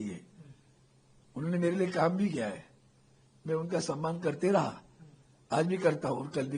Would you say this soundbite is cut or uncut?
uncut